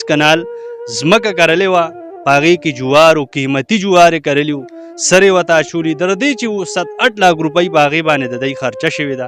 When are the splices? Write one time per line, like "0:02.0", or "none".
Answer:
none